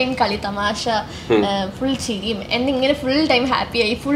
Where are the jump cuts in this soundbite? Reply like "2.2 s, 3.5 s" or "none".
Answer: none

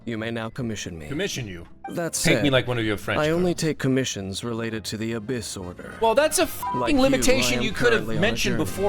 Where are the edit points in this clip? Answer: none

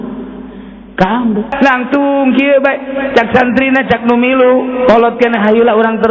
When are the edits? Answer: 1.5 s

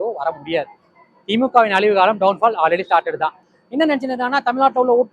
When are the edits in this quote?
3.5 s

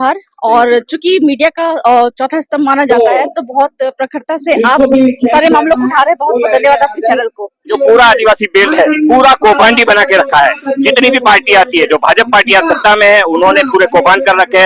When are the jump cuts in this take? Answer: 7.7 s

